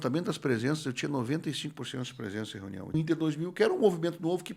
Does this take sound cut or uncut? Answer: cut